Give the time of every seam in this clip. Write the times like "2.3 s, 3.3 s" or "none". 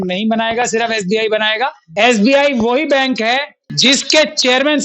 1.8 s, 3.6 s